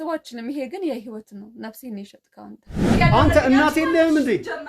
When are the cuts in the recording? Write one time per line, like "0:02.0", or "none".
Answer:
0:02.9

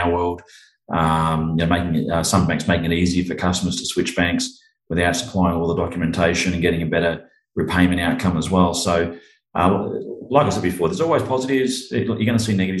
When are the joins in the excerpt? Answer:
none

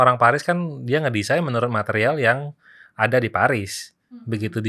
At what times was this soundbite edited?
none

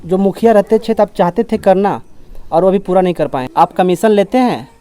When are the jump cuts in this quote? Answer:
0:03.4

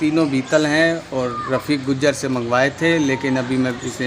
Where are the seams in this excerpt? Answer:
none

